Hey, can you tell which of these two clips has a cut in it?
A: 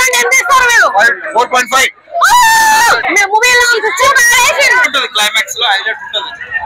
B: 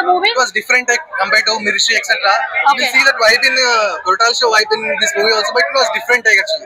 A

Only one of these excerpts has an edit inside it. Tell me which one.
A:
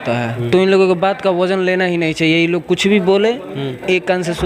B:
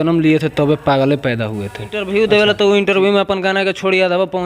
B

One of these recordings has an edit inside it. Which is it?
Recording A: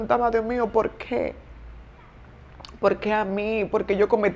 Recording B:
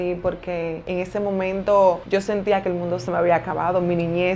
B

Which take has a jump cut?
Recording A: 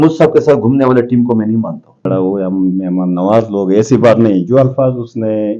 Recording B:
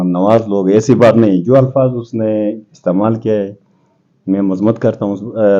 A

